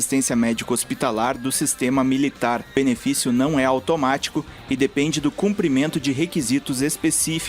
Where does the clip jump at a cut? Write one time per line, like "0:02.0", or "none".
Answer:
0:02.7